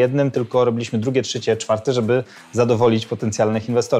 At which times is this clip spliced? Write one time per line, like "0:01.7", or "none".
none